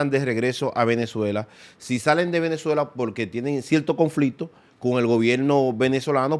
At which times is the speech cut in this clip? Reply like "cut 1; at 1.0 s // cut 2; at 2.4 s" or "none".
none